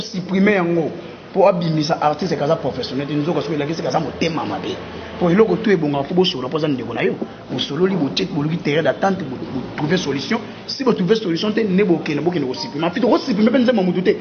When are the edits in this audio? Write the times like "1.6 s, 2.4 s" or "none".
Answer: none